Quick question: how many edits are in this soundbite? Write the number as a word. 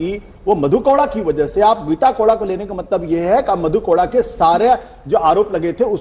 zero